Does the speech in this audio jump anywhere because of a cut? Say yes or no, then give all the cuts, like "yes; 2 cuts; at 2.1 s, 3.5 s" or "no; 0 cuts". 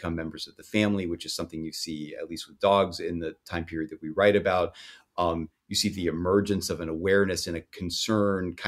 no; 0 cuts